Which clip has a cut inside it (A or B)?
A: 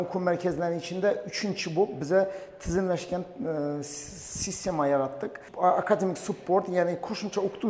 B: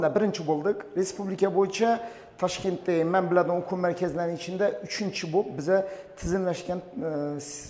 A